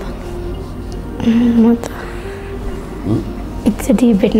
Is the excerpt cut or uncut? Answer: uncut